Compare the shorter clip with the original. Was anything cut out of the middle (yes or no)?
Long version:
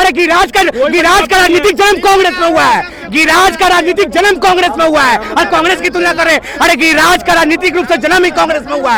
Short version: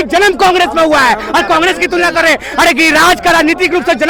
no